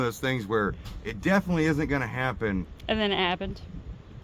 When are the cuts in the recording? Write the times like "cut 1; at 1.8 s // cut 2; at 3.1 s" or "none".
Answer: cut 1; at 2.7 s